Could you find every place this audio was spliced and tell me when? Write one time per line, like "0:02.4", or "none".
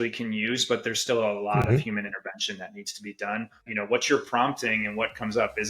0:03.6